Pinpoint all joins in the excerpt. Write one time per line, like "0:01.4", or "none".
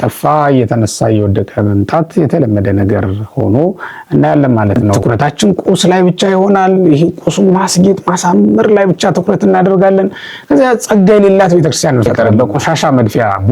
0:04.9
0:12.1